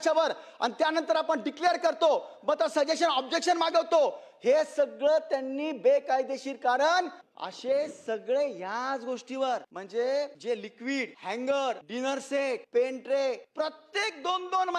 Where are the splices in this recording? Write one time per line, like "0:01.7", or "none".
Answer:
0:07.2
0:09.8
0:10.7
0:12.3
0:13.5